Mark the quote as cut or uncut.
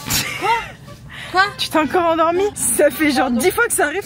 cut